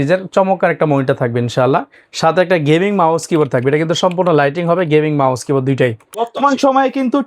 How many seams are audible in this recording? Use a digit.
1